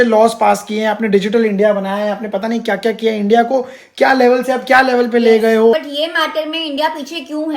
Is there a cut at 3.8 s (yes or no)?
no